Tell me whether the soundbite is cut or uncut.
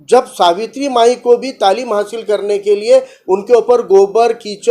uncut